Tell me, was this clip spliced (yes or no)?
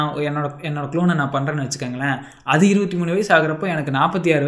no